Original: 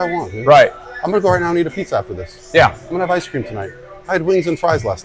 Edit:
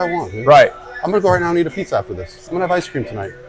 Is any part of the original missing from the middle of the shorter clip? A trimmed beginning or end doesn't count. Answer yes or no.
yes